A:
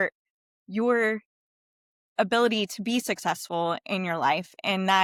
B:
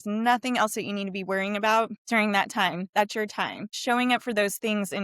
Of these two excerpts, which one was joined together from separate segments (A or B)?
B